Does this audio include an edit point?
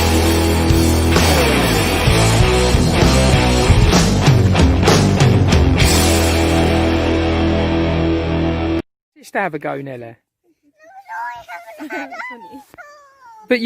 yes; 1 cut; at 8.8 s

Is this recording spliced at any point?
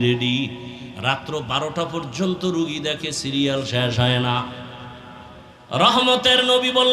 yes; 1 cut; at 5.9 s

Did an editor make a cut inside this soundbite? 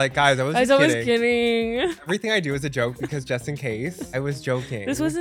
yes; 2 cuts; at 2.1 s, 4.1 s

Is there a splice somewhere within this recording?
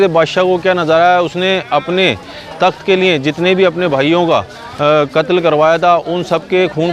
no; 0 cuts

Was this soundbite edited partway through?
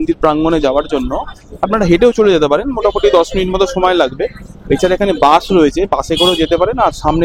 no; 0 cuts

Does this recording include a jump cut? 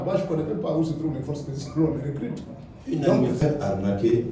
yes; 1 cut; at 3.4 s

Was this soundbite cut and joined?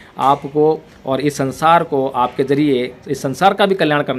no; 0 cuts

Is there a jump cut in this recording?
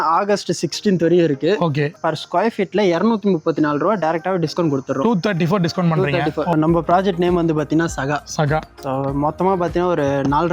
yes; 2 cuts; at 2.0 s, 6.5 s

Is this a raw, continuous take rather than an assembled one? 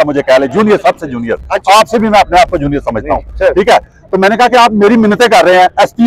yes; 0 cuts

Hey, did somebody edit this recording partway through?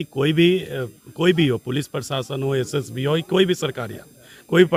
no; 0 cuts

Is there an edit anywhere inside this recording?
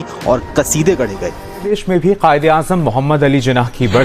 yes; 1 cut; at 1.5 s

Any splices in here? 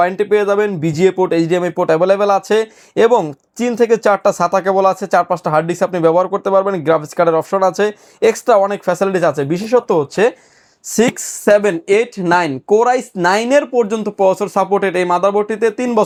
no; 0 cuts

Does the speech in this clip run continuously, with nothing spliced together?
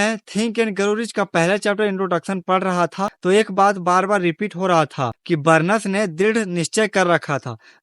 no; 2 cuts; at 3.1 s, 5.1 s

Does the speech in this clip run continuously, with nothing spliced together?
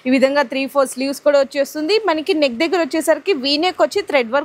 yes; 0 cuts

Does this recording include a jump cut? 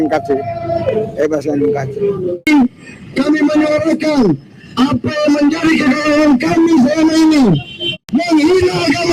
yes; 2 cuts; at 2.4 s, 7.9 s

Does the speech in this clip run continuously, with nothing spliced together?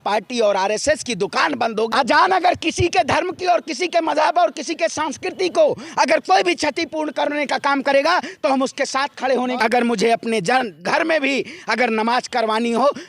no; 2 cuts; at 1.9 s, 9.6 s

